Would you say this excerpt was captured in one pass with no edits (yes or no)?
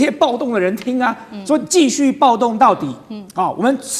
yes